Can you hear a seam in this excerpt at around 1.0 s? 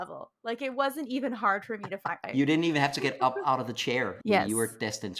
no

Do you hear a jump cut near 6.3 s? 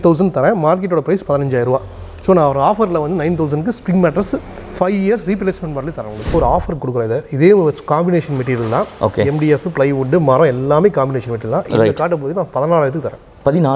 yes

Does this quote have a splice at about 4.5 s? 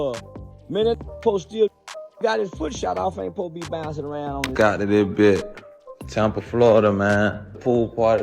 yes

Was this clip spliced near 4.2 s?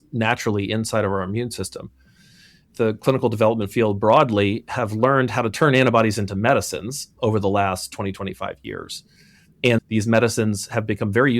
no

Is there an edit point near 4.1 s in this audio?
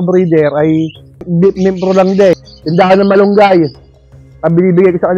no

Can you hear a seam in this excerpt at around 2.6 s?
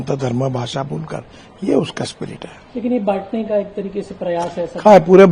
no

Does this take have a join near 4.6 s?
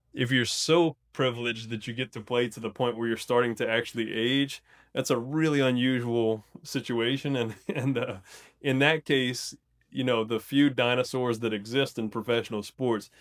no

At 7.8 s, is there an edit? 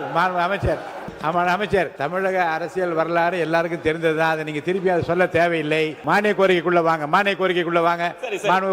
no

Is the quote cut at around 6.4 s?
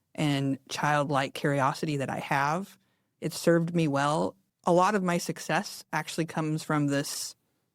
no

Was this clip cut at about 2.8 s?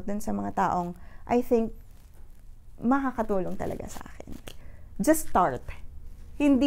no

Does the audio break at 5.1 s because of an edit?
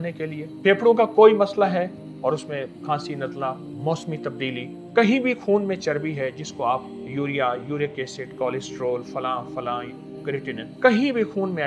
yes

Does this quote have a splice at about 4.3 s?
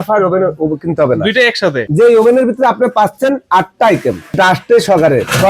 yes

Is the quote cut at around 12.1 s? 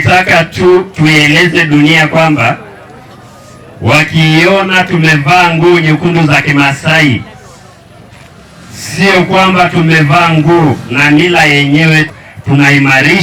yes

